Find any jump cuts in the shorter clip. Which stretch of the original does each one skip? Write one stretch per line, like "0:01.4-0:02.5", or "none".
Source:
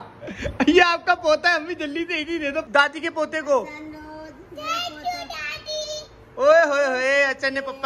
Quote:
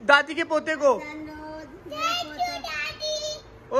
none